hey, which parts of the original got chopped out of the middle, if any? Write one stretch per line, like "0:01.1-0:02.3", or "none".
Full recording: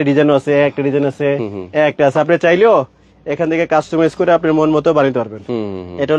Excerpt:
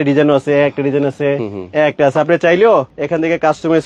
0:03.0-0:03.2